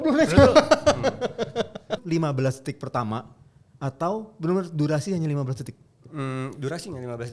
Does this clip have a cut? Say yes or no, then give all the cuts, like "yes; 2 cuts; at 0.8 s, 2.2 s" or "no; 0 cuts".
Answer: yes; 1 cut; at 2.0 s